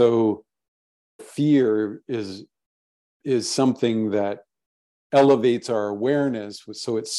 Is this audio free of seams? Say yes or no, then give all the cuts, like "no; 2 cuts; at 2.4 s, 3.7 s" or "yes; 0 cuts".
yes; 0 cuts